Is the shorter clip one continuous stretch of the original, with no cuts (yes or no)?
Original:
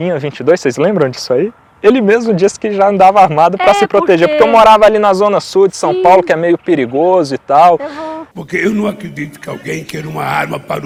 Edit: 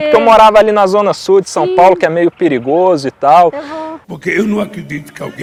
yes